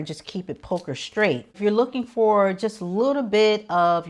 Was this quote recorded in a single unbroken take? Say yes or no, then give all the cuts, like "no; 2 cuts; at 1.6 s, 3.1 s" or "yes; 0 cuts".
no; 1 cut; at 1.5 s